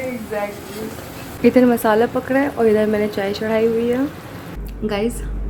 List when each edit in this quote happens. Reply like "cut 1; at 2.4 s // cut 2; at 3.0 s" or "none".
none